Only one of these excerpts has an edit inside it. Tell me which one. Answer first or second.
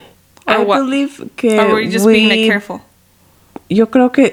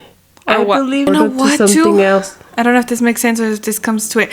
second